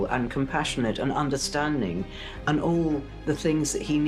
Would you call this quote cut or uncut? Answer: uncut